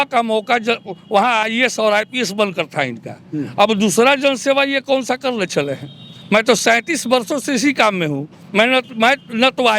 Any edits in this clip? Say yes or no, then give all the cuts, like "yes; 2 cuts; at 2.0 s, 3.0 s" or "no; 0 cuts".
no; 0 cuts